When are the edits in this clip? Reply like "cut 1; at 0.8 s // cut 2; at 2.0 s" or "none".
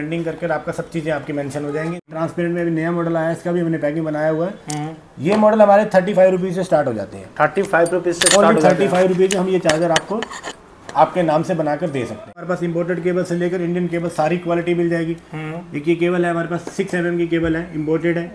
cut 1; at 2.0 s // cut 2; at 12.4 s